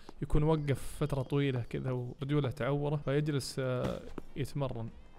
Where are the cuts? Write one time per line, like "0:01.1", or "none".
0:02.1
0:03.0